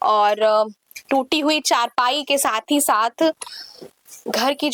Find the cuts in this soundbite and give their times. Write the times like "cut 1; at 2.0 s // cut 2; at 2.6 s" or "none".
none